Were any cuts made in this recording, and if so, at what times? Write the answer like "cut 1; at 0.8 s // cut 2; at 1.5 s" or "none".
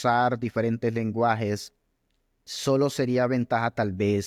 none

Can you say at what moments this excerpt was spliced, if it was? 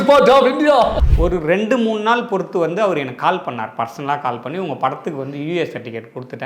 cut 1; at 1.0 s

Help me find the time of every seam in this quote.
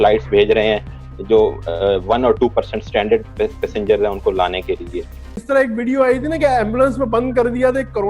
cut 1; at 5.4 s

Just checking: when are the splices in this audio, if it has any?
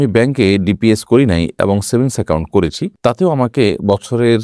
none

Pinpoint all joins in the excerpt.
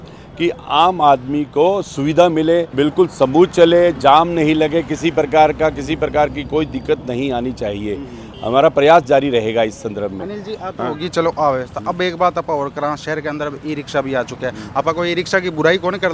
none

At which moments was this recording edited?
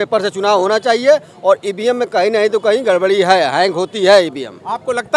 none

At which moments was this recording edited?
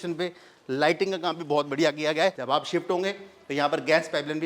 cut 1; at 2.4 s

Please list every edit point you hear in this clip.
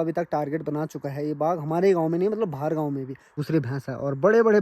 cut 1; at 3.4 s

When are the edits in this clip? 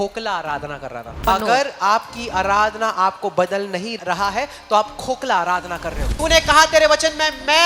cut 1; at 1.3 s // cut 2; at 4.0 s // cut 3; at 6.1 s

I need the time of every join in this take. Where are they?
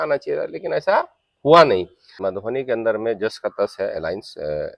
cut 1; at 2.2 s

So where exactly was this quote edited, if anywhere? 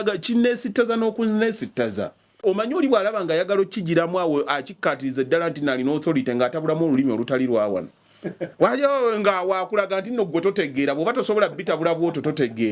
cut 1; at 2.4 s

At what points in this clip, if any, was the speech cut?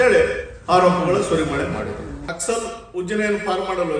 cut 1; at 2.3 s

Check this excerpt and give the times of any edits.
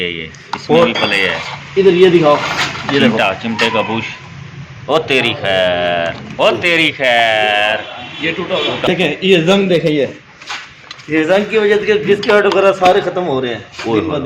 cut 1; at 8.9 s

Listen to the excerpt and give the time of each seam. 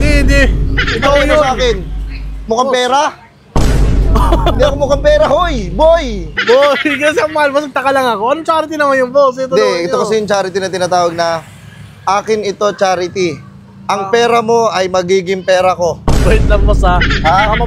none

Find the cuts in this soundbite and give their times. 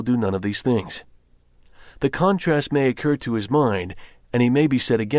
cut 1; at 1.9 s

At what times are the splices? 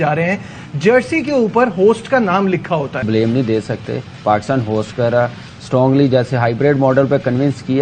cut 1; at 3.0 s

